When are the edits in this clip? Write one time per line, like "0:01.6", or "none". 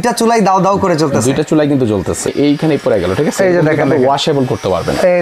0:02.3